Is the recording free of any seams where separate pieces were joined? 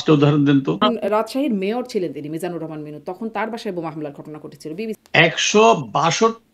no; 2 cuts; at 0.8 s, 5.0 s

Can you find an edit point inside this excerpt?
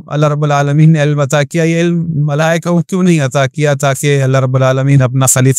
no; 0 cuts

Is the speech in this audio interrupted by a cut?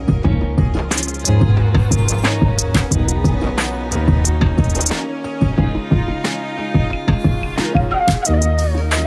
no; 0 cuts

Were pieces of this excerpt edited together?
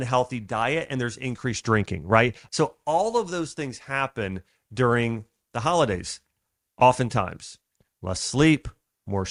no; 0 cuts

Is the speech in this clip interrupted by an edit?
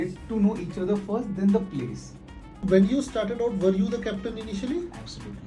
yes; 1 cut; at 2.6 s

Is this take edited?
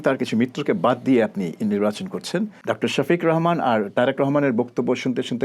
yes; 1 cut; at 2.6 s

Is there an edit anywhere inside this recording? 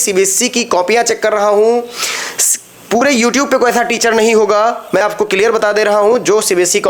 no; 0 cuts

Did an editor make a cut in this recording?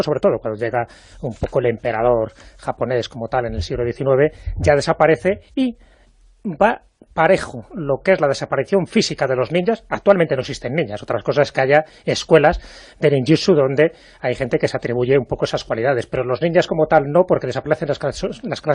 no; 0 cuts

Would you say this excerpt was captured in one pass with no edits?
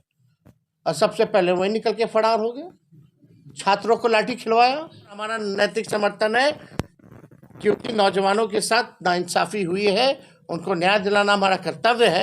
no; 1 cut; at 5.4 s

